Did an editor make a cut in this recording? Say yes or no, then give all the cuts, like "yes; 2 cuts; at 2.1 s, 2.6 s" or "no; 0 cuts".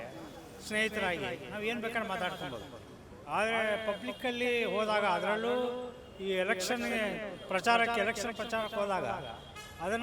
no; 0 cuts